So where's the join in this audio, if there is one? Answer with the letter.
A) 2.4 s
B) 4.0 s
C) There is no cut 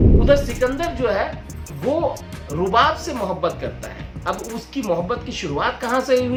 C